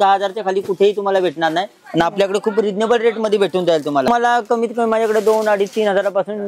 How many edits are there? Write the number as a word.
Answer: one